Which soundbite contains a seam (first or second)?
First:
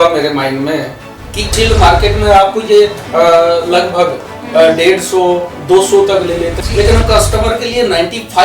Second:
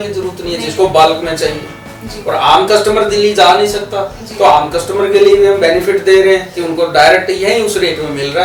first